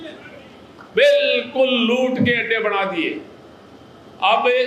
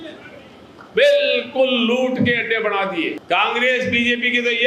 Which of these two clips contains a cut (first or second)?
second